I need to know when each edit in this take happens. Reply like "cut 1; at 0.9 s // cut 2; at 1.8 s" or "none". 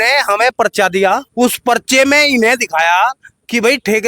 cut 1; at 1.3 s